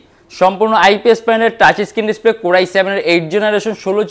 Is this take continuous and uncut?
yes; 0 cuts

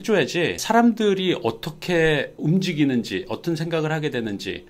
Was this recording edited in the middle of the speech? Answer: no; 0 cuts

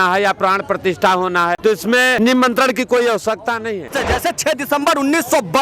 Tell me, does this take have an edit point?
yes; 2 cuts; at 1.9 s, 4.0 s

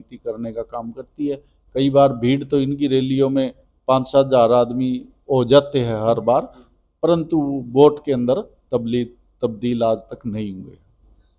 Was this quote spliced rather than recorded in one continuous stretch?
no; 0 cuts

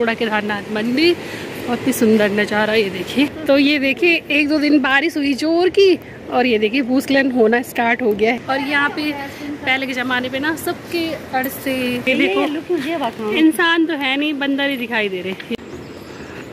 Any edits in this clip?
yes; 4 cuts; at 3.3 s, 8.4 s, 12.0 s, 15.5 s

